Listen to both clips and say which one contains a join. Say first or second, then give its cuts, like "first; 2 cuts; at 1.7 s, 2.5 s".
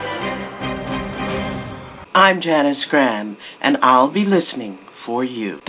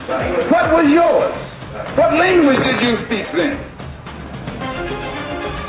first; 1 cut; at 1.8 s